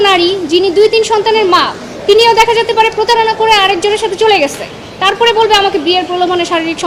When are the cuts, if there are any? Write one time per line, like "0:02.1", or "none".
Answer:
none